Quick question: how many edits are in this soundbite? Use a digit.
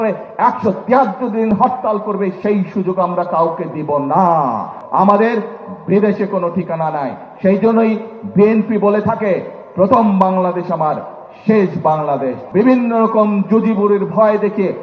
2